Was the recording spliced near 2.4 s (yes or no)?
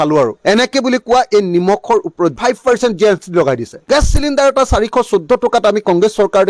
yes